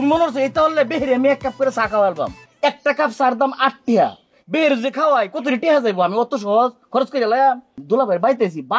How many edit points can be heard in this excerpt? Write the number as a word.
two